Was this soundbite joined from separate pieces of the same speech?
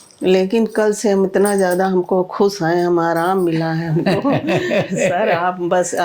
no; 0 cuts

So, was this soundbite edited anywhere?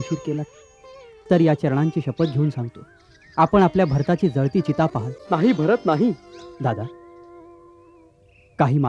yes; 1 cut; at 6.4 s

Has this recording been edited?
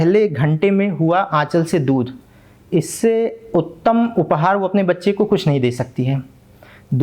no; 0 cuts

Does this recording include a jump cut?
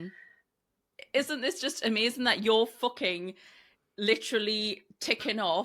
yes; 1 cut; at 0.9 s

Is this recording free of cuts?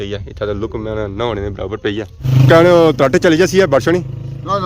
no; 1 cut; at 2.3 s

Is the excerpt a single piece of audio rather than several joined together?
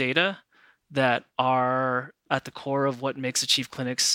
yes; 0 cuts

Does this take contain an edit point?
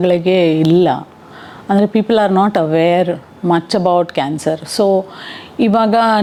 no; 0 cuts

